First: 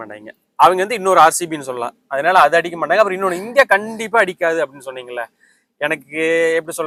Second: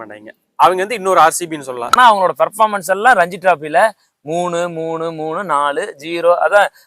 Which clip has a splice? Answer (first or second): second